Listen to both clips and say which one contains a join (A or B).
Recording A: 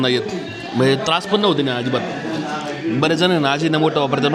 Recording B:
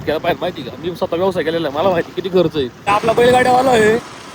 B